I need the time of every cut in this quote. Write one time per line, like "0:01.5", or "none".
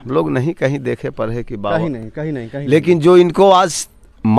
none